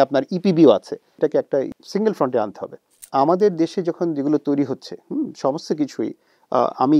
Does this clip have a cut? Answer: yes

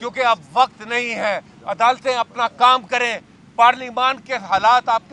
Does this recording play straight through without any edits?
yes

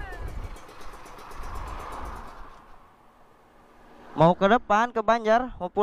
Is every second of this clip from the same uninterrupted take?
yes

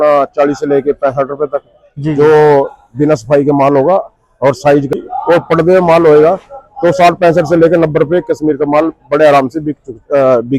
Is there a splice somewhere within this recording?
yes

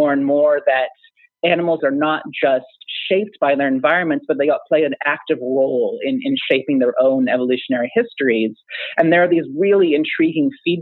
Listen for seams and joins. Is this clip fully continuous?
no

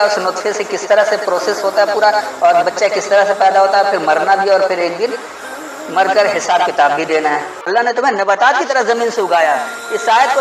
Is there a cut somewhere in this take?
yes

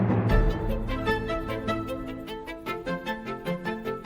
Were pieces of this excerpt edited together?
no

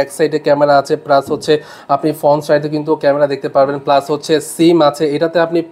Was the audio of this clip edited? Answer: no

